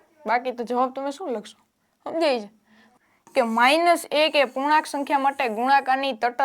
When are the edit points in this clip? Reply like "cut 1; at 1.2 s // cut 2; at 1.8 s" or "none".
cut 1; at 2.8 s